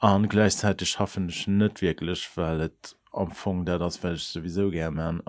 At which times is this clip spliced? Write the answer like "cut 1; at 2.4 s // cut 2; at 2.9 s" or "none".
none